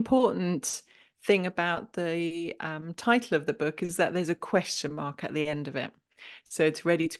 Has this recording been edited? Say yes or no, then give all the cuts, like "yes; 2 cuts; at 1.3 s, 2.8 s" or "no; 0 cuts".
no; 0 cuts